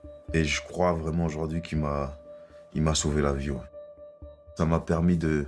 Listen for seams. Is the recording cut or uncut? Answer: cut